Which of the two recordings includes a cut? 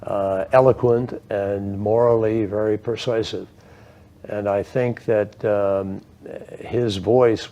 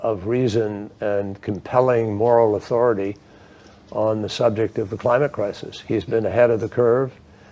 first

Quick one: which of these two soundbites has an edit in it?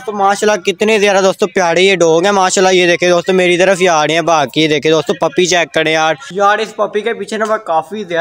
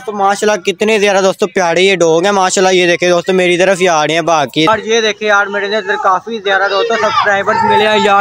second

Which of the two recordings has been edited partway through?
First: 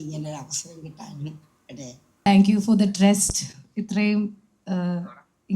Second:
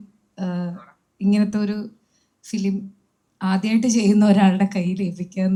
first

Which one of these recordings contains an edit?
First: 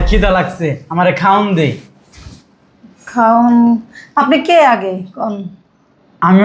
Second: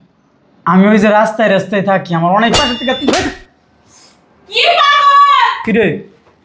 second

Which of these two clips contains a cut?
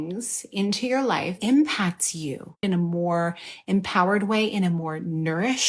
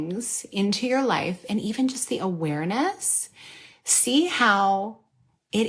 first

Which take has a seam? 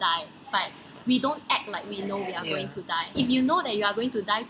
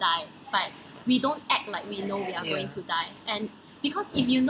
first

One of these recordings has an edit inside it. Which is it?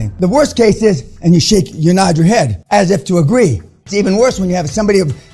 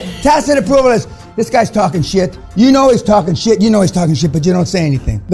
first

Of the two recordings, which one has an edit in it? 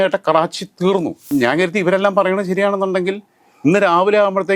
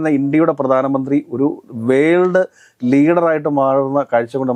first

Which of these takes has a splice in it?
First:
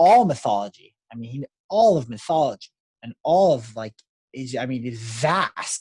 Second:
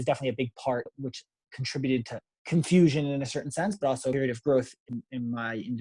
second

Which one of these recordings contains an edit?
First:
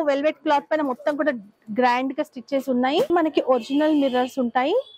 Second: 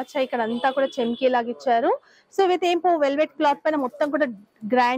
first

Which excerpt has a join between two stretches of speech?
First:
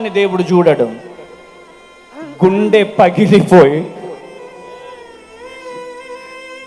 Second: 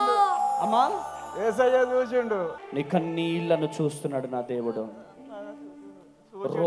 second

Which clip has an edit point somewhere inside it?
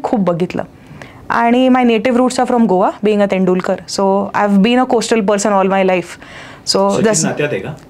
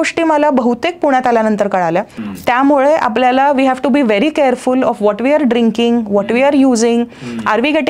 second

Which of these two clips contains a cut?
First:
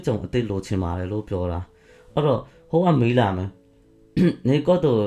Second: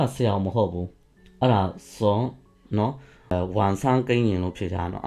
second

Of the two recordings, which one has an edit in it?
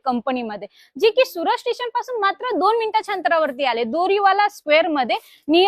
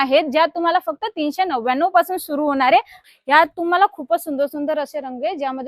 second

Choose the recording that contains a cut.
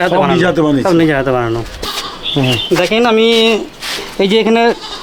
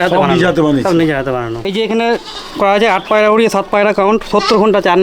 second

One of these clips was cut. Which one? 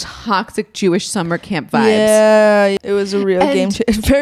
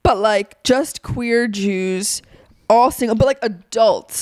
first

